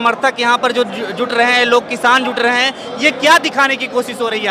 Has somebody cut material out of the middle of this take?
no; 0 cuts

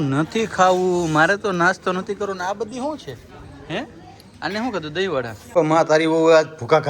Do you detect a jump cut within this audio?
yes; 1 cut; at 5.4 s

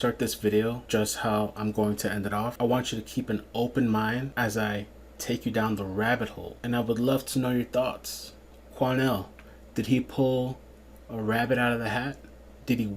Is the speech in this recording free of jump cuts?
no; 4 cuts; at 0.8 s, 2.5 s, 4.3 s, 6.5 s

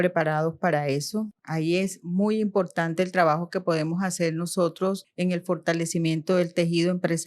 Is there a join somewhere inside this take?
yes; 2 cuts; at 1.4 s, 5.1 s

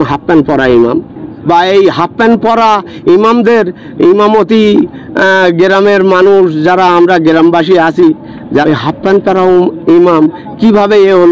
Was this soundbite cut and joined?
yes; 2 cuts; at 1.3 s, 8.6 s

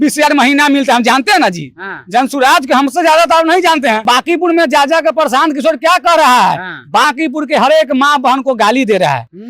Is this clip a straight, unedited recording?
no; 1 cut; at 4.0 s

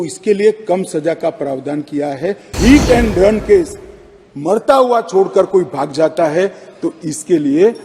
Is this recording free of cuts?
no; 1 cut; at 2.5 s

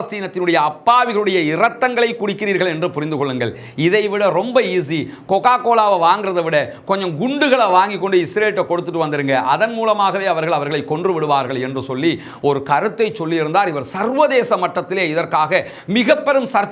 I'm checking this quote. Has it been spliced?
no; 0 cuts

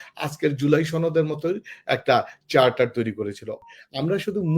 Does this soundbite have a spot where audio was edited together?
yes; 1 cut; at 3.5 s

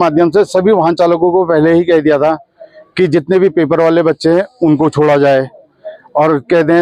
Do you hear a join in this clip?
no; 0 cuts

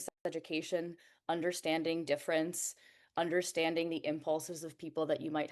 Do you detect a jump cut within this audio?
no; 0 cuts

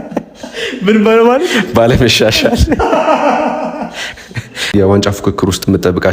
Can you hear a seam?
yes; 1 cut; at 4.6 s

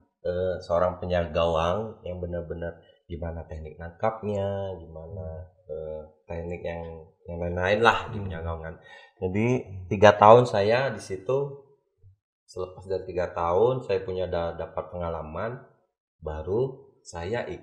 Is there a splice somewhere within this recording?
no; 0 cuts

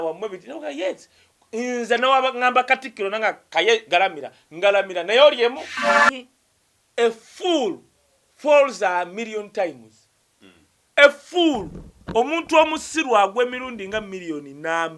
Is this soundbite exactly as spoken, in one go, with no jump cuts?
no; 1 cut; at 5.9 s

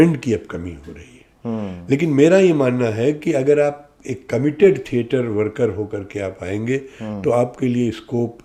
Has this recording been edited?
no; 0 cuts

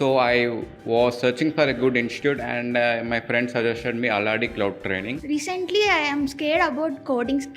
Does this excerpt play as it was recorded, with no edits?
no; 1 cut; at 5.1 s

